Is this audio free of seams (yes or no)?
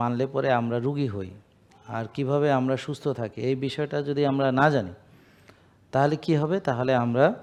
yes